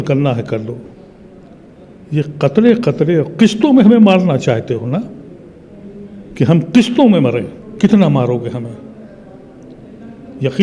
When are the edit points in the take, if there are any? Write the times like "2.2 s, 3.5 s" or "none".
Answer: none

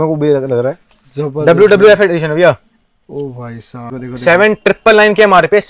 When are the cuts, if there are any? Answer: 3.9 s

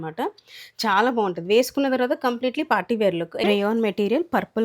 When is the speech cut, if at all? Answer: 3.4 s

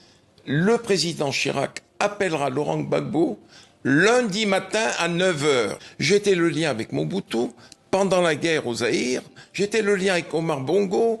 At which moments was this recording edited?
5.8 s

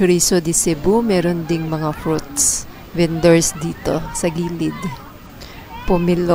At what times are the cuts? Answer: none

